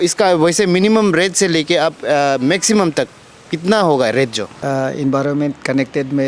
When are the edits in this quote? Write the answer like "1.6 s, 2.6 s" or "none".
4.5 s